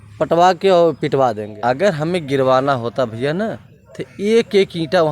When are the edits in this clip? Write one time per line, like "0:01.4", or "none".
0:01.5

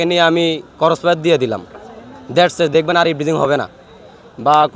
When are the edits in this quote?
none

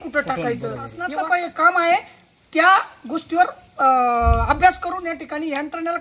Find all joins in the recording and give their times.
0:01.0

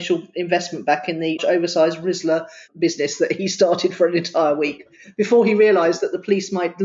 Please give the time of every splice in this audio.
0:01.4
0:02.7

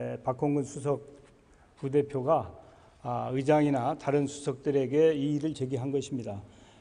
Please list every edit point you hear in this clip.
none

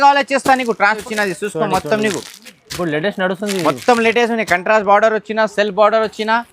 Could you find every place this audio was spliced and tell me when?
0:01.0

